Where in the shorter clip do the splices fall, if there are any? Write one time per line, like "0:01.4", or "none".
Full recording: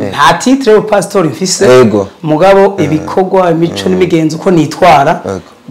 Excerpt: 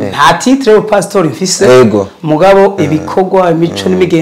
none